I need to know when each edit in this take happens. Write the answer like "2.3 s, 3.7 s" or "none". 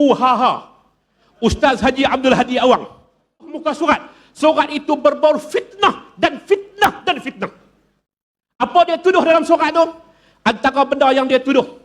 3.6 s